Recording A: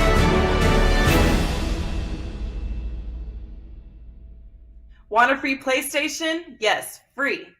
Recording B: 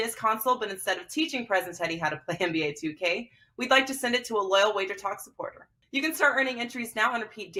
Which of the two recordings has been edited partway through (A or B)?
A